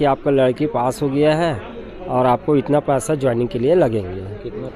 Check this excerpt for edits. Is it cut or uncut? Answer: uncut